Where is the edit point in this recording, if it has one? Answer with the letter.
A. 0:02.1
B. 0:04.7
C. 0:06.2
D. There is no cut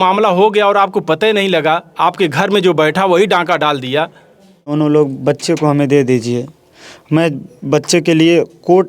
B